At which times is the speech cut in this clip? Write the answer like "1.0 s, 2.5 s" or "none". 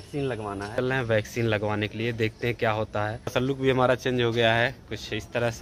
0.8 s, 3.3 s